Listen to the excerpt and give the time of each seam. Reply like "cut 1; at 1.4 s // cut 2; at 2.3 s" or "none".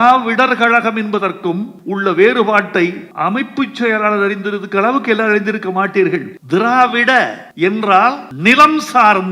cut 1; at 1.7 s // cut 2; at 3.1 s // cut 3; at 6.3 s // cut 4; at 7.4 s // cut 5; at 8.3 s